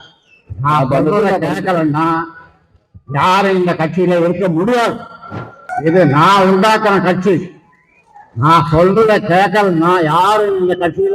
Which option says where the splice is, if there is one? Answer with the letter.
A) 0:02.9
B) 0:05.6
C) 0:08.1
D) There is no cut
B